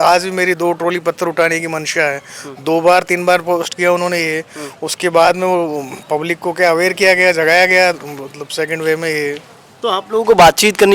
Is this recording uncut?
yes; 0 cuts

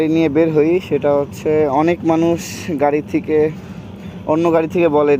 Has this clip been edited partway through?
no; 0 cuts

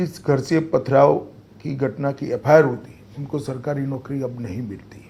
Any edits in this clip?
no; 0 cuts

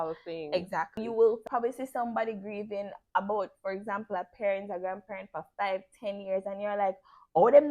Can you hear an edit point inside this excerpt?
yes; 1 cut; at 0.9 s

